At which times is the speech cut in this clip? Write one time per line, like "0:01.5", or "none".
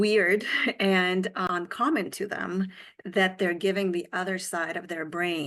0:01.4